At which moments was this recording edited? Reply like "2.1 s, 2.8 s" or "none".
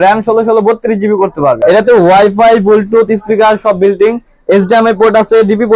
1.6 s